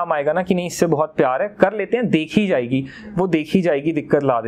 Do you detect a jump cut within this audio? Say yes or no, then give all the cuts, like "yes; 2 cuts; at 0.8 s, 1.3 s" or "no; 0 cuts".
no; 0 cuts